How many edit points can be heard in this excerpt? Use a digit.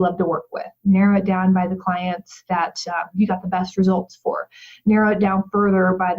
1